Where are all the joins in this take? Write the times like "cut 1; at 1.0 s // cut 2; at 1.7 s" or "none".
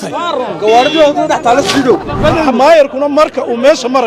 cut 1; at 2.2 s